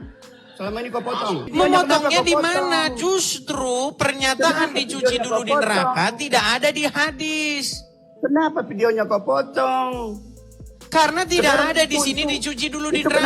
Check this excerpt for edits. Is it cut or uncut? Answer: cut